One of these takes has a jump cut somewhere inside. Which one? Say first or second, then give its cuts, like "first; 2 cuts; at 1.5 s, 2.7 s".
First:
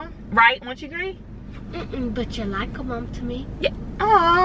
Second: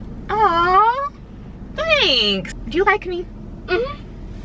second; 1 cut; at 2.6 s